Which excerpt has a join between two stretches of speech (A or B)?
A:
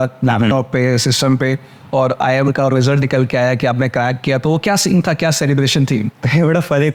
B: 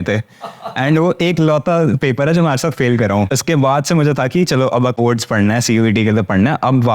B